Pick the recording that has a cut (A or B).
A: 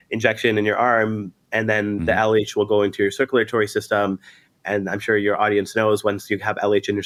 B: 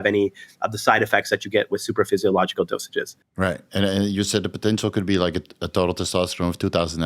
B